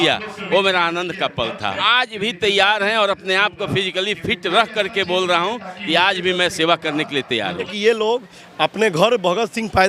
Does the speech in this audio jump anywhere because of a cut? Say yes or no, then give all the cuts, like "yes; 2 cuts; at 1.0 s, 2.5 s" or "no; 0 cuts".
yes; 2 cuts; at 1.8 s, 7.7 s